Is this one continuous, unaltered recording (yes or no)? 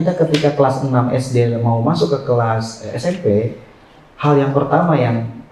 yes